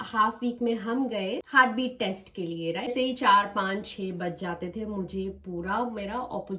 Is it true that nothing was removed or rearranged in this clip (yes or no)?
no